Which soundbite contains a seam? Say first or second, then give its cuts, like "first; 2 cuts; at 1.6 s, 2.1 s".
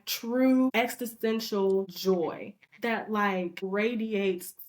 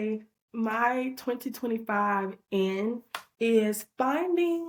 first; 3 cuts; at 0.7 s, 1.9 s, 3.7 s